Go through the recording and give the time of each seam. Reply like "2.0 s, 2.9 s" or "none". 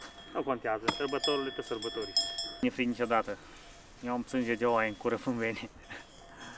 2.6 s